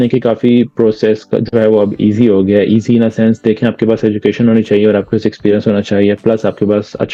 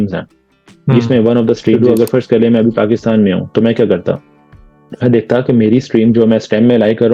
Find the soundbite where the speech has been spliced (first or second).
second